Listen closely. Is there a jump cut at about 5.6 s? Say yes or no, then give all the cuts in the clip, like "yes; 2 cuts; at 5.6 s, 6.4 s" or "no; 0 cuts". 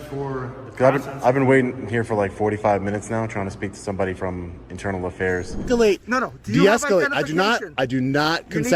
yes; 1 cut; at 5.6 s